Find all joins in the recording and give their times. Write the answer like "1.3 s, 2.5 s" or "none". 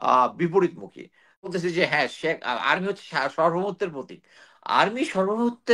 1.5 s